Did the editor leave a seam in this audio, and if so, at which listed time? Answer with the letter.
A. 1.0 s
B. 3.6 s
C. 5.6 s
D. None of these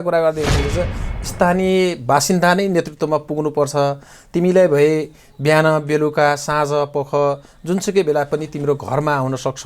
A